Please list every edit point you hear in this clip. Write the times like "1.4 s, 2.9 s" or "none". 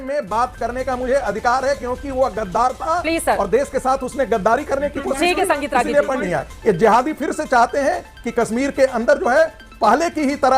6.2 s